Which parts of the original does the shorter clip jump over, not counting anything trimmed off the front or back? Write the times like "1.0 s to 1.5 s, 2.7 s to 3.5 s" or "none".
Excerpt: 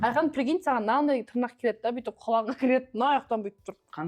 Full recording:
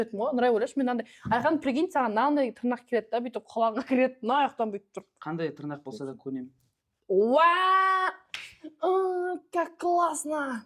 none